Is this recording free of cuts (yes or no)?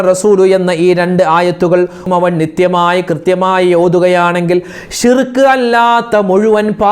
no